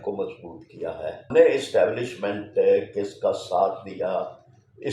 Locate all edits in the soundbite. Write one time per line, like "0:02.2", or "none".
0:01.3